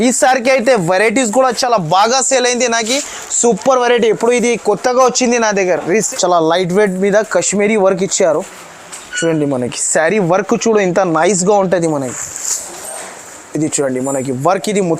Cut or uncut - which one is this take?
cut